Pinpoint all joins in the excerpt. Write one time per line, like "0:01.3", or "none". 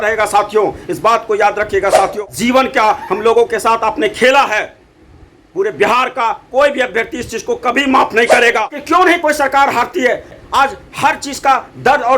0:02.2
0:08.8
0:10.4